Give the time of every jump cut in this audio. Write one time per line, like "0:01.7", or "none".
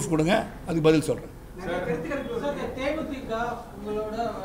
none